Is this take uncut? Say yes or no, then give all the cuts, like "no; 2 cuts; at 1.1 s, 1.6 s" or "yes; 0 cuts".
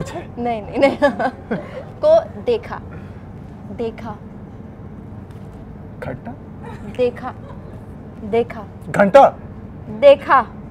yes; 0 cuts